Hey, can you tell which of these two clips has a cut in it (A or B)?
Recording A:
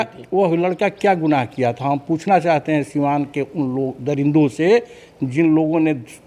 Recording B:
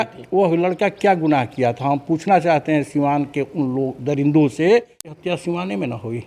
B